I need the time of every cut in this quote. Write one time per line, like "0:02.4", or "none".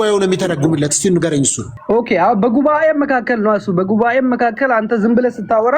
0:01.7